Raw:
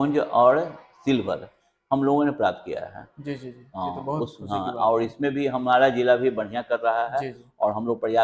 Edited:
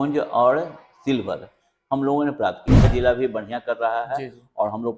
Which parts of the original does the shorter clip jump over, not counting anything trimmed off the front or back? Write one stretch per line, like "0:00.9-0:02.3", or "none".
0:02.9-0:05.9